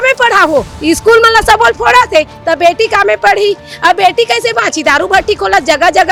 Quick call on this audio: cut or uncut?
uncut